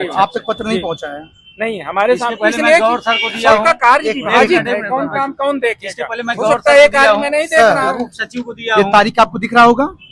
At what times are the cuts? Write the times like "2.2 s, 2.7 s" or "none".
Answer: none